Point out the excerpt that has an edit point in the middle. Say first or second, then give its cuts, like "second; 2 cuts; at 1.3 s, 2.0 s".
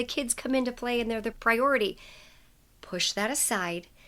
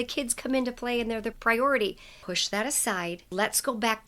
second; 2 cuts; at 2.1 s, 3.3 s